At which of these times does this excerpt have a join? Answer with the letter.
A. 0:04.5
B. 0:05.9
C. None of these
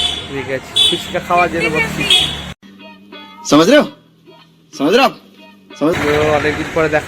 B